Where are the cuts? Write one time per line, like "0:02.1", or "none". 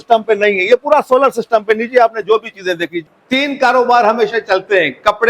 0:03.0